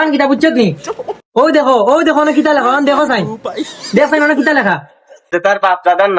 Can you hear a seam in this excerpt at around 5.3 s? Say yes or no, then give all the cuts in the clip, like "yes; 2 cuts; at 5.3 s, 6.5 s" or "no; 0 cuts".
yes; 1 cut; at 5.3 s